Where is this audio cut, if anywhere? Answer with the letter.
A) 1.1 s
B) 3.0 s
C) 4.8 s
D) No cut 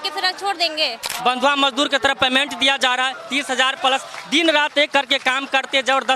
A